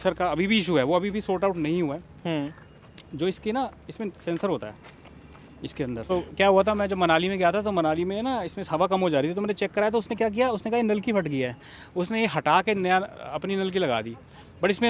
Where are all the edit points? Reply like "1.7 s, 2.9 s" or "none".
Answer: none